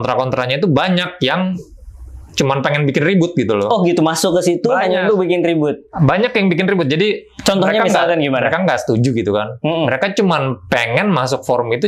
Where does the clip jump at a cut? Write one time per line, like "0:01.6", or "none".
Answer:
none